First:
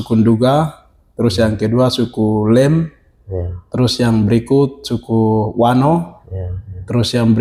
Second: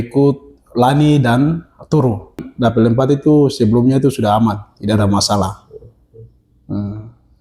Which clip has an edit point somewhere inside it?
second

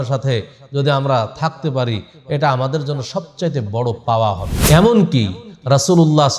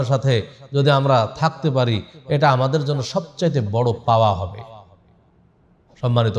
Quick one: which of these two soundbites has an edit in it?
first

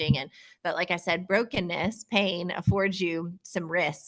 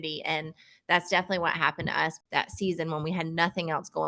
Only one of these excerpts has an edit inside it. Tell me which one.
second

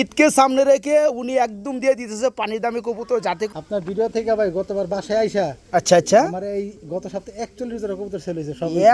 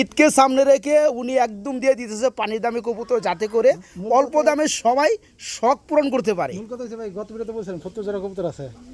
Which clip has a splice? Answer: first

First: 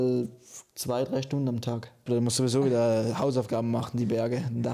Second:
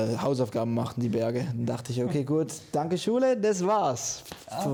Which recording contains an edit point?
first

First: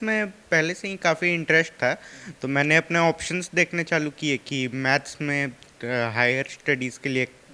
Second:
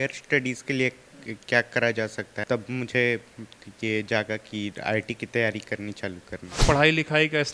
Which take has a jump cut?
second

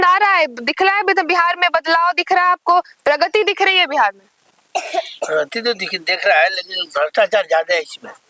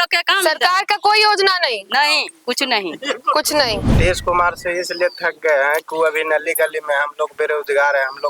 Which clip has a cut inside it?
second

